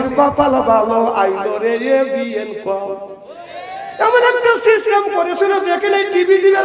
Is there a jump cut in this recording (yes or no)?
no